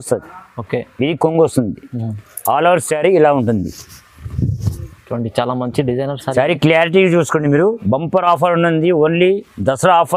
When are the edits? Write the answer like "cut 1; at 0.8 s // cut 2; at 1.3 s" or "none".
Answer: none